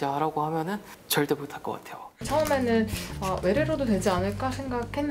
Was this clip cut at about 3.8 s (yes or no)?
no